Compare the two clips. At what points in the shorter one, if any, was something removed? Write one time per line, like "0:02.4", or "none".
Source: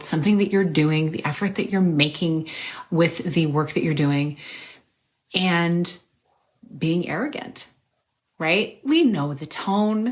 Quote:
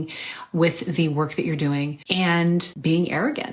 0:02.0
0:02.7